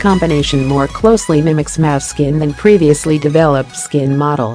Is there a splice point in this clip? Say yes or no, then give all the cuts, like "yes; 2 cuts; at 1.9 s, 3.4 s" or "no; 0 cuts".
no; 0 cuts